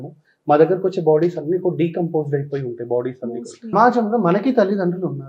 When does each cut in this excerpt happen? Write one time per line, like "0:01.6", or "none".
0:03.7

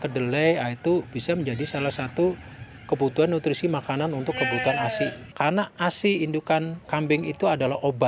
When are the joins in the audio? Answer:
0:05.2
0:06.8

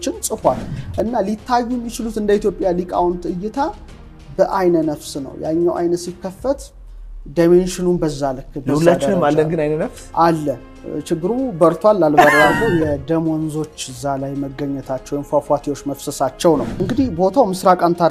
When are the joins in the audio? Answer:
0:12.6
0:16.8

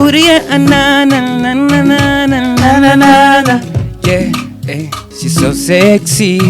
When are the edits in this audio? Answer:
none

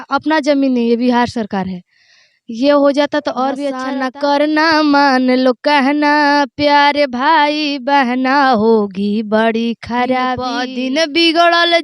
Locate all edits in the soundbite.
0:03.8
0:10.5

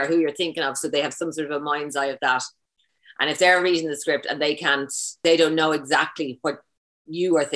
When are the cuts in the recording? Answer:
0:05.2

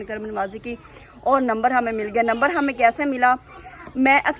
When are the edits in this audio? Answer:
none

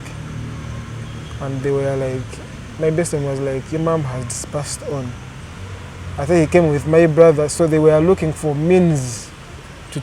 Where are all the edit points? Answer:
none

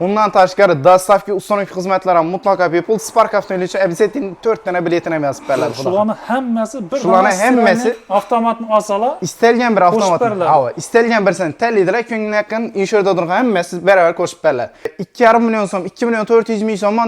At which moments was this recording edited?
0:14.9

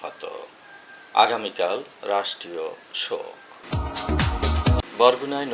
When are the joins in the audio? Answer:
0:03.6
0:04.8

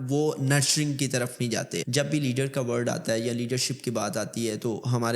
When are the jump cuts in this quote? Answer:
0:01.9

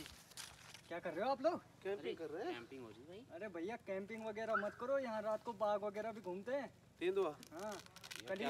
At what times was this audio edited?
none

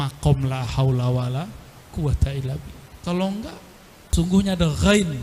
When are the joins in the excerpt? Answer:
0:04.1

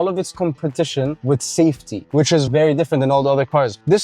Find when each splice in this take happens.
0:01.2

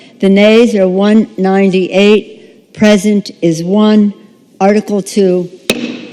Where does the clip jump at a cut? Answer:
none

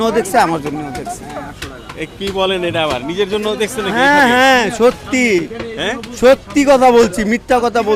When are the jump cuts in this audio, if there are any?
none

